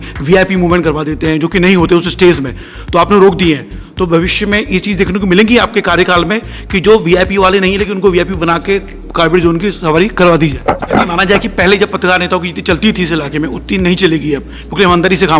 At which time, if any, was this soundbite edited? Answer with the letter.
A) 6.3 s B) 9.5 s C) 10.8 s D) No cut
C